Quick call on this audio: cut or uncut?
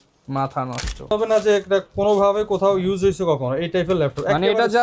cut